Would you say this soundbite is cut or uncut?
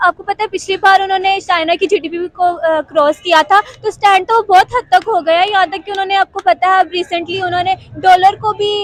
uncut